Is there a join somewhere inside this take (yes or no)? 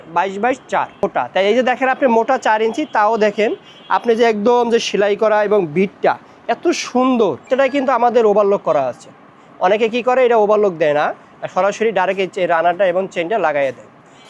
yes